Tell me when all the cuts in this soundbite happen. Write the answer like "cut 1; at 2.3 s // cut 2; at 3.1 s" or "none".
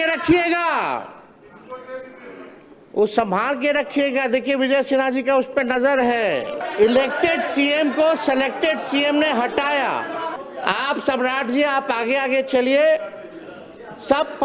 cut 1; at 6.6 s // cut 2; at 10.4 s